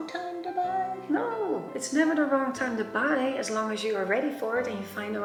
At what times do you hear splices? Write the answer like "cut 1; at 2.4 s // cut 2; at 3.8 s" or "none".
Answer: none